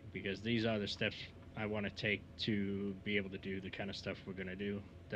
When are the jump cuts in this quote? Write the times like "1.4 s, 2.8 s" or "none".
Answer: none